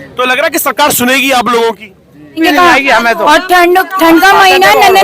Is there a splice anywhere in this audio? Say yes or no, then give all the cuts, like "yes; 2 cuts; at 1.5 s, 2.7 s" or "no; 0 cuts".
yes; 1 cut; at 2.4 s